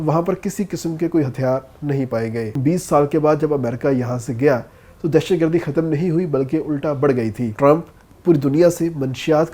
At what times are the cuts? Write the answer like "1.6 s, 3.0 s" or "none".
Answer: 2.6 s, 7.5 s